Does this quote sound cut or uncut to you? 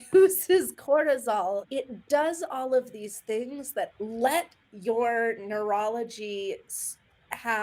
cut